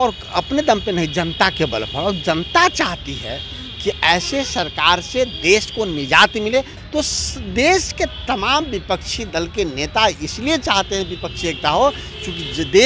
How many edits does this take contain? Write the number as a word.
one